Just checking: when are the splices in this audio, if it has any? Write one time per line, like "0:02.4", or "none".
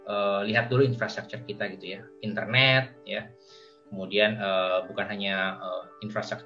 none